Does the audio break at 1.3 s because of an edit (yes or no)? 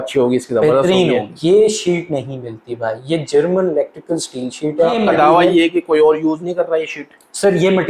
yes